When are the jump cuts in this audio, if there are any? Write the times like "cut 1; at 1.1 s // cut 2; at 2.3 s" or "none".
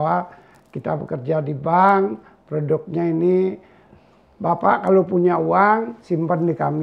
none